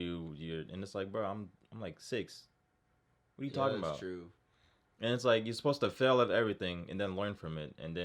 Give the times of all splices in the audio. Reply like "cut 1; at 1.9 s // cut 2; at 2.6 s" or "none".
none